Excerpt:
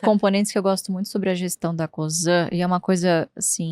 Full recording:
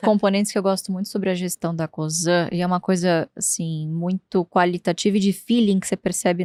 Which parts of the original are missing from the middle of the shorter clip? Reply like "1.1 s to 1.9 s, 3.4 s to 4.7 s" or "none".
none